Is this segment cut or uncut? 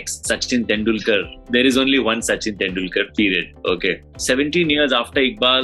cut